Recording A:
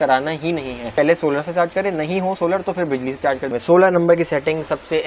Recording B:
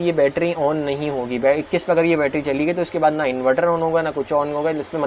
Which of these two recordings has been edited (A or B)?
A